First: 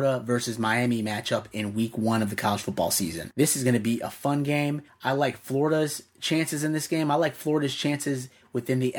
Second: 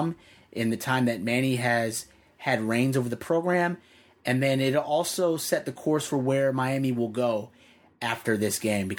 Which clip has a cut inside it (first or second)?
first